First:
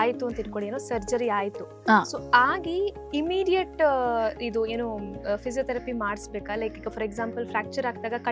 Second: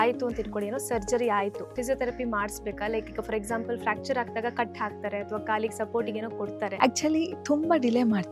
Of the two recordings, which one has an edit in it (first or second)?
second